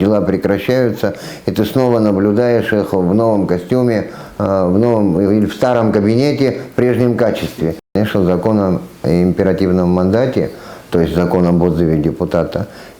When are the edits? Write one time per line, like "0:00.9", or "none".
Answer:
0:07.9